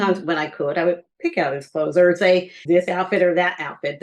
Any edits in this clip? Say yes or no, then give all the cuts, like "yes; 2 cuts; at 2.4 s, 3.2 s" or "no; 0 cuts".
yes; 1 cut; at 2.5 s